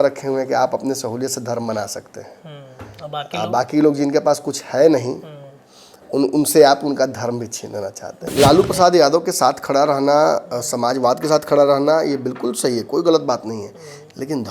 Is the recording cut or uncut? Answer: cut